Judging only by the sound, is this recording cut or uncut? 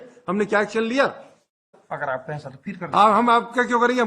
cut